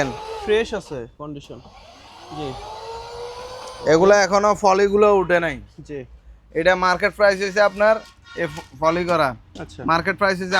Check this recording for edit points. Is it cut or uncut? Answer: uncut